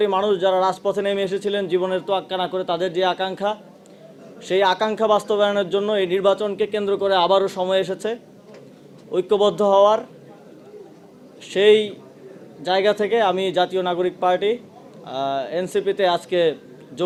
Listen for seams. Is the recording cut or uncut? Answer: uncut